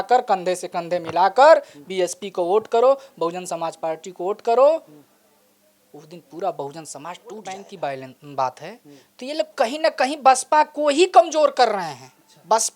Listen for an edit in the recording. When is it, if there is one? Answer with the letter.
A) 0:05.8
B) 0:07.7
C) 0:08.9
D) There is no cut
B